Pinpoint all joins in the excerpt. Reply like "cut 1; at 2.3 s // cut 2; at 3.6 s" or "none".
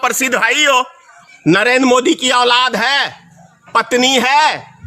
cut 1; at 1.1 s